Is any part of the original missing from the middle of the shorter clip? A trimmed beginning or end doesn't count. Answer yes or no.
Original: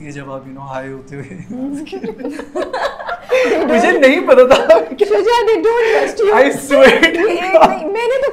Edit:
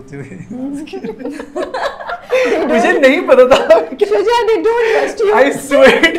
no